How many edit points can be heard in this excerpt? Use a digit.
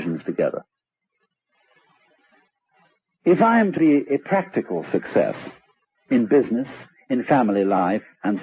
1